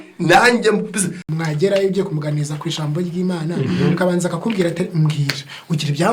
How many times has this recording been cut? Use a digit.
1